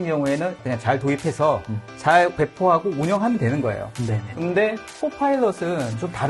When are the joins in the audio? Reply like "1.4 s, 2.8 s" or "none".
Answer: 2.3 s